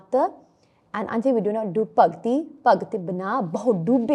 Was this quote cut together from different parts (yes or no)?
no